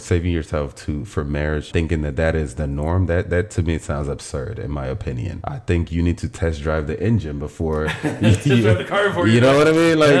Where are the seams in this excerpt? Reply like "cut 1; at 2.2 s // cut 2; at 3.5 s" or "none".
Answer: cut 1; at 1.7 s // cut 2; at 5.3 s